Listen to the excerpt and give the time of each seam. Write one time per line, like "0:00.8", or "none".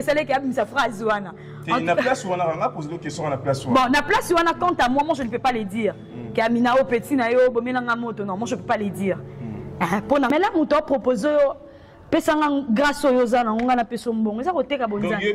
0:10.3